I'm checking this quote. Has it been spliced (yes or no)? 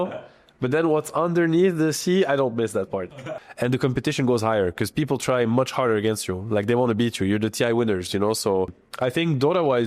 yes